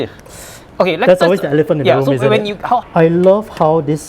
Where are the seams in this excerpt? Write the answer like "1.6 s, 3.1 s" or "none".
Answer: 2.8 s